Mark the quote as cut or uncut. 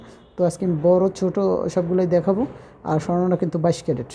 uncut